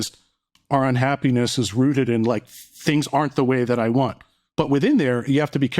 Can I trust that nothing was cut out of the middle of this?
no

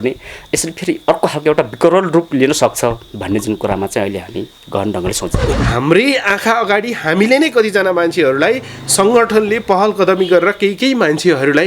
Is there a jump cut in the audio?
yes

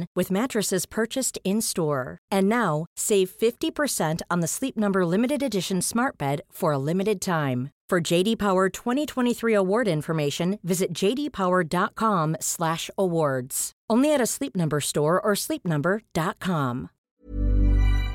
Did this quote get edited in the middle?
yes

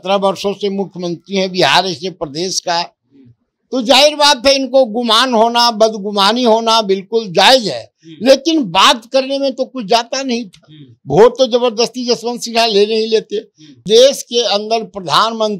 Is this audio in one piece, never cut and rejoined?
no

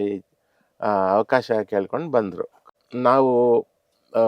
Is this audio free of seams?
no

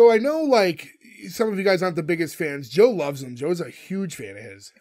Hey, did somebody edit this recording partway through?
no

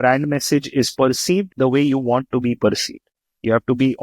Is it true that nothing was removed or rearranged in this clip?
no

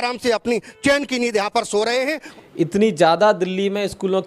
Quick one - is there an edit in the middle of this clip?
yes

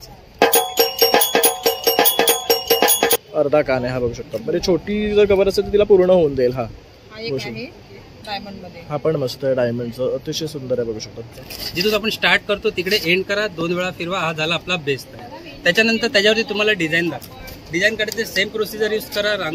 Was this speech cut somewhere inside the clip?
yes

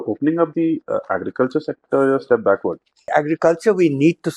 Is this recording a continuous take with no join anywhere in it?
no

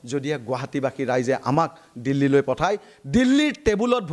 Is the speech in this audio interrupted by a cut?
no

